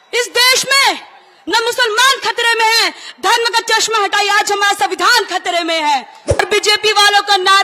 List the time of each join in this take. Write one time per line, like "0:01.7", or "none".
0:06.4